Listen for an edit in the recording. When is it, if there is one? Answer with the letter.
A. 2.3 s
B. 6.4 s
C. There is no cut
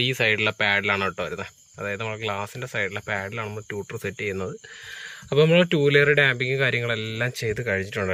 C